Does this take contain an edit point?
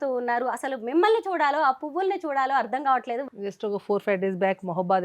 yes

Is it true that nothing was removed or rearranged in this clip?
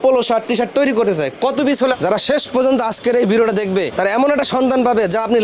no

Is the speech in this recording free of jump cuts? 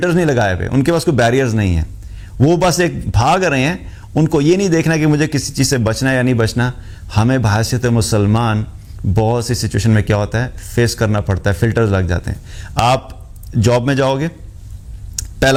yes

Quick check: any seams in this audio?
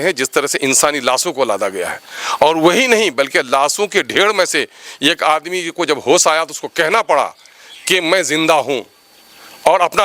no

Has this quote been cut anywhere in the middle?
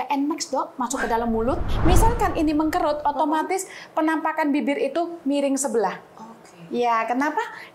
yes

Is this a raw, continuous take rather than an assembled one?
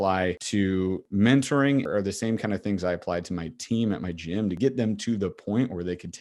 no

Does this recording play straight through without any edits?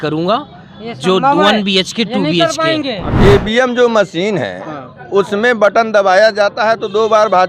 no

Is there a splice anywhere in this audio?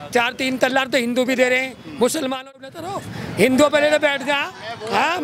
no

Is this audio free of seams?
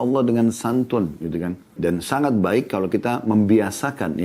no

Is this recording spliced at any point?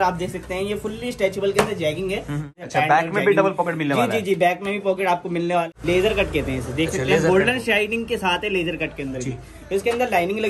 yes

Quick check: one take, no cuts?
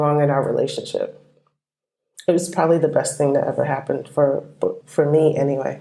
no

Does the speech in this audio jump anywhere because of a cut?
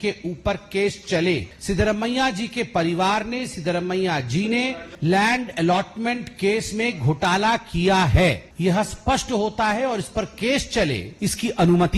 yes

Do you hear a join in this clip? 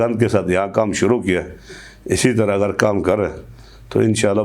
no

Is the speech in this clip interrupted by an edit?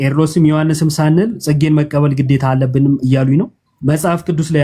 yes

